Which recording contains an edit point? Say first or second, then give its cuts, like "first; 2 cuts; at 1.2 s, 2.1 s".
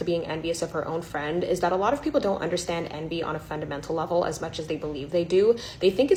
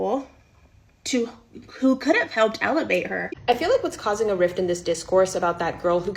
second; 1 cut; at 3.3 s